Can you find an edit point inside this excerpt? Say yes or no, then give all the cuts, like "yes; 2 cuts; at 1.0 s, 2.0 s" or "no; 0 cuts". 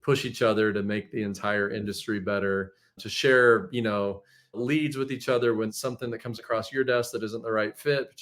yes; 3 cuts; at 3.0 s, 4.6 s, 5.7 s